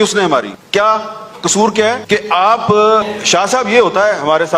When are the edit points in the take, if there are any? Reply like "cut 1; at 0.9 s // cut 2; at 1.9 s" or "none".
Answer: cut 1; at 3.1 s

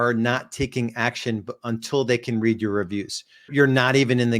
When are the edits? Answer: cut 1; at 3.5 s

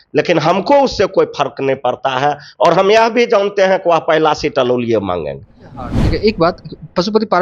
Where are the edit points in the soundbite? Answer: cut 1; at 5.9 s

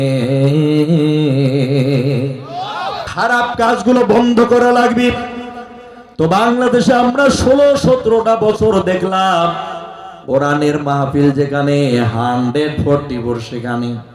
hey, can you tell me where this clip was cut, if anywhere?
cut 1; at 3.0 s

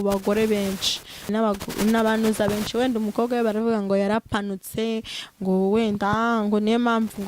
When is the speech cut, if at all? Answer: cut 1; at 1.3 s

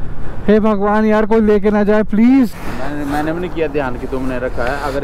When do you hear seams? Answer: cut 1; at 2.7 s

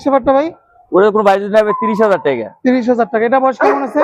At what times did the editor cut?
none

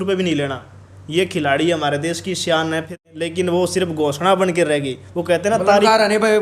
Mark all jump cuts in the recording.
cut 1; at 3.0 s

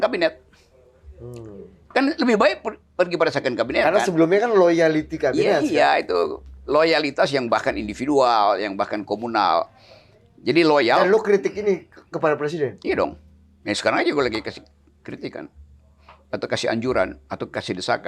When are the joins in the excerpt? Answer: none

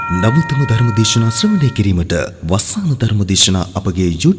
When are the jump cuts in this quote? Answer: none

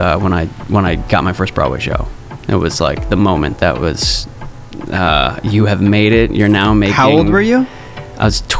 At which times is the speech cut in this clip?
none

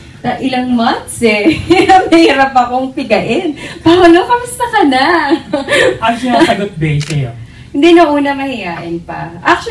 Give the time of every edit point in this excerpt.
cut 1; at 6.5 s

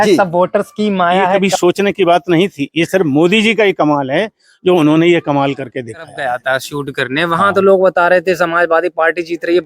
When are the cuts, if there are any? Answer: cut 1; at 1.4 s // cut 2; at 6.1 s

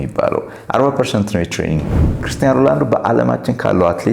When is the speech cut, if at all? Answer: cut 1; at 2.3 s

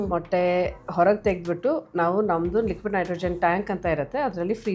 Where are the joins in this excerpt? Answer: none

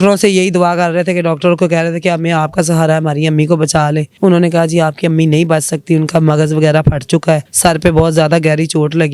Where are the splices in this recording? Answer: cut 1; at 4.1 s // cut 2; at 7.5 s

